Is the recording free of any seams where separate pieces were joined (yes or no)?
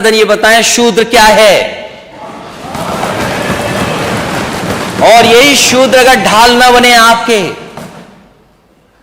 yes